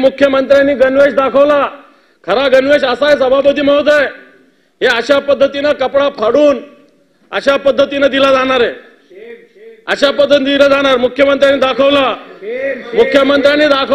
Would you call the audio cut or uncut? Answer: uncut